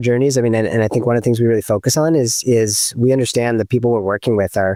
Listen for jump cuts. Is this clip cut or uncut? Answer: uncut